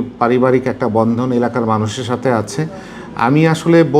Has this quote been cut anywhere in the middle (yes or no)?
no